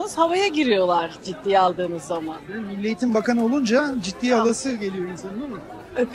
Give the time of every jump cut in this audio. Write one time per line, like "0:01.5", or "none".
none